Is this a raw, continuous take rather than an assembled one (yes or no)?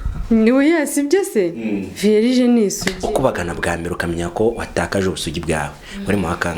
yes